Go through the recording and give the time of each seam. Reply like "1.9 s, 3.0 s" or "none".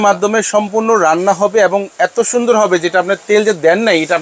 none